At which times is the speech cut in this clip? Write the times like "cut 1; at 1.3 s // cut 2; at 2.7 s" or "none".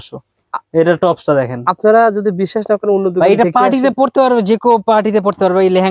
none